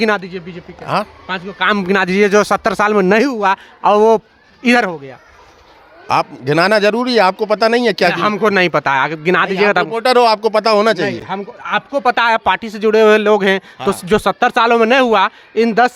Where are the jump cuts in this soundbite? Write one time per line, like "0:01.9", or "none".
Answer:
none